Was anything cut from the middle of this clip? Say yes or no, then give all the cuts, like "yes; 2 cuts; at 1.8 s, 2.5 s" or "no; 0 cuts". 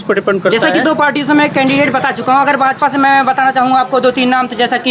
no; 0 cuts